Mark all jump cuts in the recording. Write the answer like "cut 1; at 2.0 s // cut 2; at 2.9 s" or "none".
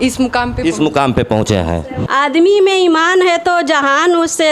cut 1; at 1.9 s